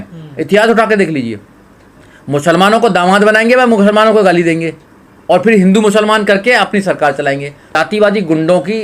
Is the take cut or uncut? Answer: cut